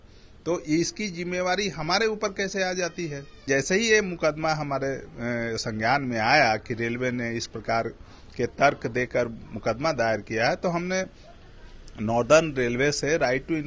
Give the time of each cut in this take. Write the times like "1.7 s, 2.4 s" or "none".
3.4 s